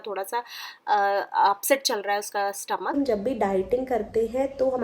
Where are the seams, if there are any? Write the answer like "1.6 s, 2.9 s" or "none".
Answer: 2.9 s